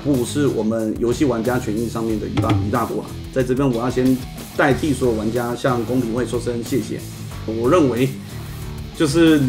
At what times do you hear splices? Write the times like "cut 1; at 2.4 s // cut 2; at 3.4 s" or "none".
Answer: cut 1; at 7.4 s